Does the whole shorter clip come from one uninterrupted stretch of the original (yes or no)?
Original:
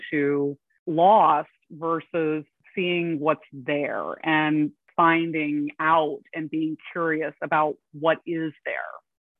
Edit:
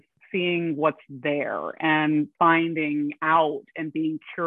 no